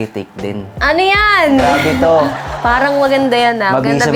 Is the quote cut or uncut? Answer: uncut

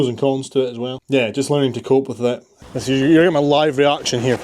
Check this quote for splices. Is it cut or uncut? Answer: cut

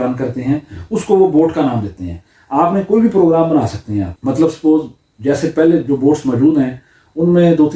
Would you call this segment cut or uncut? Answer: cut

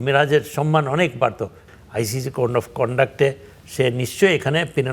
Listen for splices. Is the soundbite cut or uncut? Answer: cut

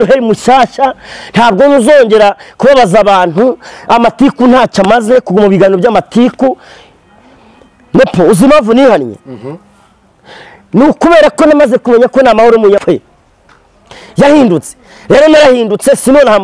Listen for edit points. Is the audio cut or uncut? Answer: cut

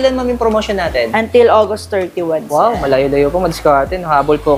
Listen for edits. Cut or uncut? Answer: uncut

